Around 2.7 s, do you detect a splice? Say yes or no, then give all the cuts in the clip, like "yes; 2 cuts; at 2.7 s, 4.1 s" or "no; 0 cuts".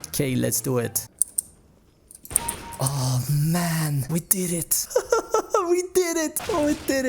no; 1 cut; at 1.0 s